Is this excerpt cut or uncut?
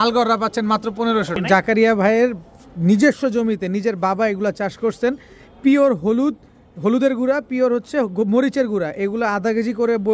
cut